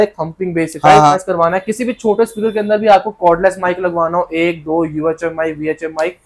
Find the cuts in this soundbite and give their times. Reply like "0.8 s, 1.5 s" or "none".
1.2 s